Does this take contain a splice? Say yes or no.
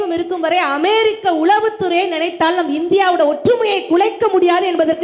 no